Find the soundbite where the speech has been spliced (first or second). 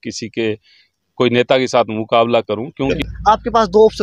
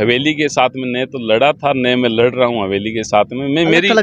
first